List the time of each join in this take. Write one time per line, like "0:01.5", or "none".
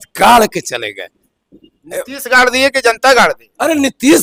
none